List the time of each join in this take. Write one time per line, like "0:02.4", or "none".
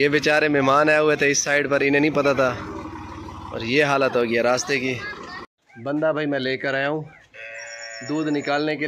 0:05.4